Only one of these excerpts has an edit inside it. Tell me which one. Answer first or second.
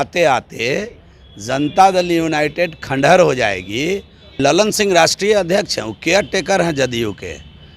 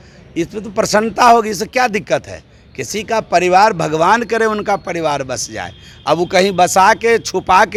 first